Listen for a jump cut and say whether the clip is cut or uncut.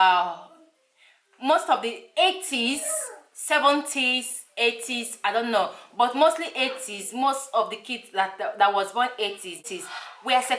cut